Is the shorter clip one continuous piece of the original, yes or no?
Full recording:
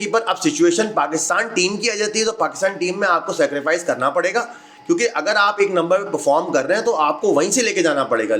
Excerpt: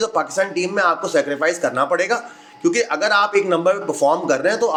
yes